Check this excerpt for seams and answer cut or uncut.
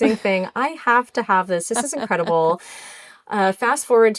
uncut